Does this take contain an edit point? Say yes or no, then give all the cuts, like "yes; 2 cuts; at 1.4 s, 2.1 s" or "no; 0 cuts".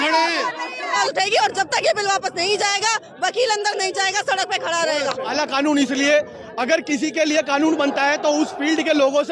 yes; 2 cuts; at 1.0 s, 5.3 s